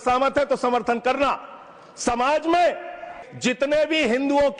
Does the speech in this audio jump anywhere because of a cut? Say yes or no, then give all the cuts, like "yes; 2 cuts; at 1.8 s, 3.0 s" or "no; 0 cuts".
yes; 1 cut; at 3.2 s